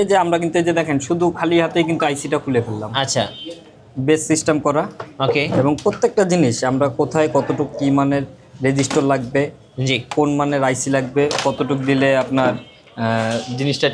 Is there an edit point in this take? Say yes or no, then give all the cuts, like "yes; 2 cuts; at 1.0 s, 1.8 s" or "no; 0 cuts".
no; 0 cuts